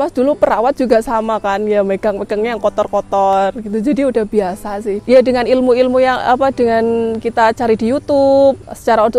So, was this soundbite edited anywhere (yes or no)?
yes